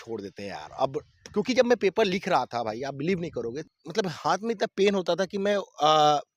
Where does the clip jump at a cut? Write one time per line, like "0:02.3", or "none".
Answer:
0:03.6